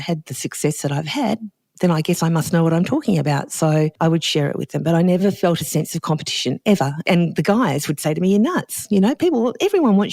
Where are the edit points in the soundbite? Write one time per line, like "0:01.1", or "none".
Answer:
0:03.9
0:05.2
0:07.1